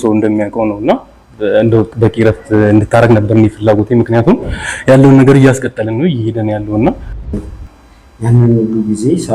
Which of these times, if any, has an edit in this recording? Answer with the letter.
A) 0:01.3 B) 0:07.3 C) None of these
B